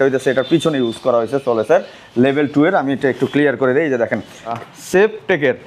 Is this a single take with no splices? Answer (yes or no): no